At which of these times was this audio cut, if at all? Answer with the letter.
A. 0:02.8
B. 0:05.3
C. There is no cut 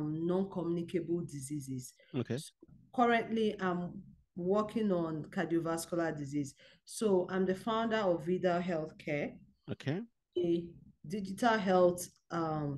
A